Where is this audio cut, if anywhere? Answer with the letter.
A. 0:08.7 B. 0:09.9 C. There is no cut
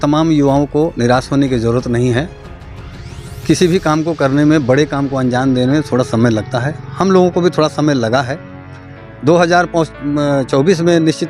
C